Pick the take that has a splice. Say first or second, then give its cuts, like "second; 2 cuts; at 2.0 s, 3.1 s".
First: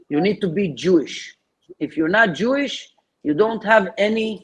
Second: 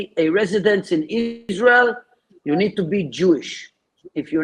second; 1 cut; at 1.4 s